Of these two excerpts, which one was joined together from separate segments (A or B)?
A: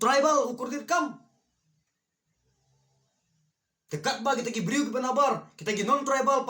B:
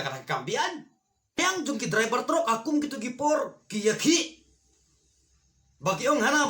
B